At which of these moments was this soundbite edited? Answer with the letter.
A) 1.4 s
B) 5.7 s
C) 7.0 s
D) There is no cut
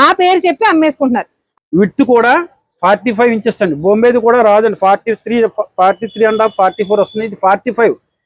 A